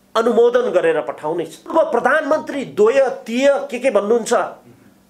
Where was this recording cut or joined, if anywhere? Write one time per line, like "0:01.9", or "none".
0:01.7